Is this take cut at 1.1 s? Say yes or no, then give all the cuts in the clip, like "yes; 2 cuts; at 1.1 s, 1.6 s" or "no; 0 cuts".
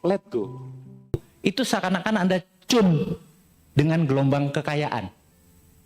yes; 1 cut; at 1.1 s